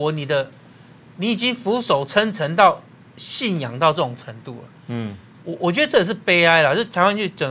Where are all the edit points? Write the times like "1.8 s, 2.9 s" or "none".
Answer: none